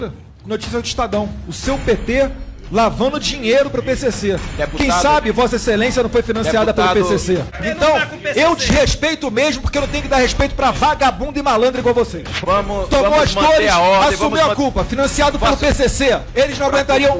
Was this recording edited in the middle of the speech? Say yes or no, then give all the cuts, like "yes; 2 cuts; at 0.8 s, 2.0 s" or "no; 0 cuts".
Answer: yes; 2 cuts; at 7.5 s, 12.4 s